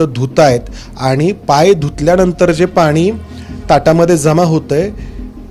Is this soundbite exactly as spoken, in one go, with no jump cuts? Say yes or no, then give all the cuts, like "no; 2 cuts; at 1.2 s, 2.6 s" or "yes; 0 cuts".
yes; 0 cuts